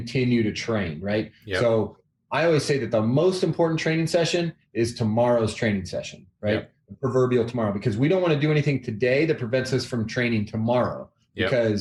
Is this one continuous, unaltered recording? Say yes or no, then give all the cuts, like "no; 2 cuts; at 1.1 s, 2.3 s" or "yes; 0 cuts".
yes; 0 cuts